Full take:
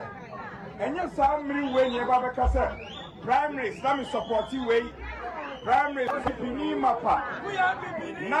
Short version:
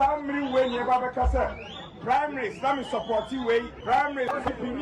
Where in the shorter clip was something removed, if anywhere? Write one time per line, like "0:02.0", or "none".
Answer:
0:03.8

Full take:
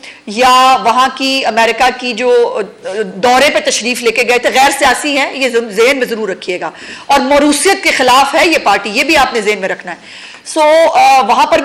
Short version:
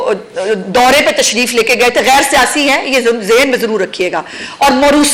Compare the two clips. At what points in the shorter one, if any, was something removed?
none

